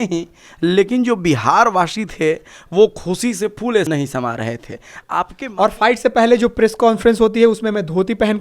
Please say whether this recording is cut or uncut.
cut